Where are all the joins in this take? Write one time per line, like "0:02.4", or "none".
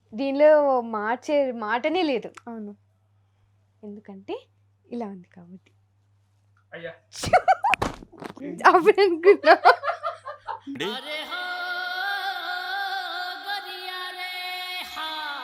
none